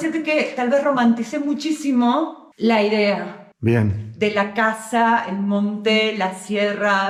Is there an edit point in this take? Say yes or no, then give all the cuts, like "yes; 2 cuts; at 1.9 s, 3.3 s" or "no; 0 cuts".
no; 0 cuts